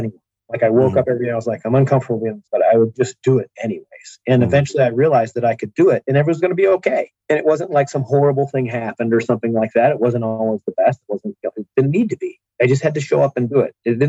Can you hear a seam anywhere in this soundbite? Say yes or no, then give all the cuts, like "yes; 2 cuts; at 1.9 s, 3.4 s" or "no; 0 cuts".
yes; 2 cuts; at 2.4 s, 7.1 s